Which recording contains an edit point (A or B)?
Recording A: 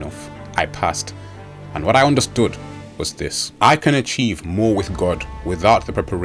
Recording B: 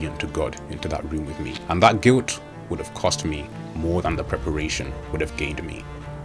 B